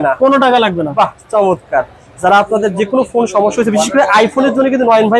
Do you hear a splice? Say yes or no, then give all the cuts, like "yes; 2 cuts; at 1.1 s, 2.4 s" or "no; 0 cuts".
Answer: no; 0 cuts